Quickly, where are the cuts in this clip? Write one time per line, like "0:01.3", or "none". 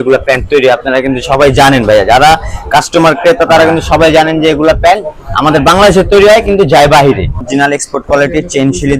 0:07.5